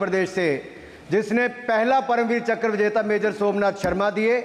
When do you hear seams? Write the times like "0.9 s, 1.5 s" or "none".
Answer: none